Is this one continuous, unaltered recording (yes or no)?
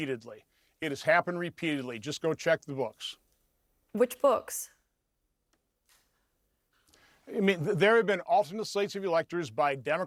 yes